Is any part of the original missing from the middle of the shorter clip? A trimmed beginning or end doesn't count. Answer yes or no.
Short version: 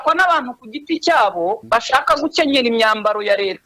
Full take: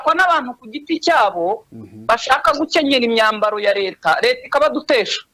yes